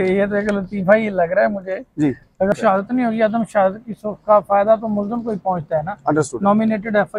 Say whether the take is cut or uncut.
cut